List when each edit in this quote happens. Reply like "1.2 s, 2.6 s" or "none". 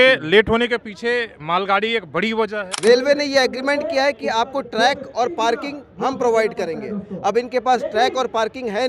2.6 s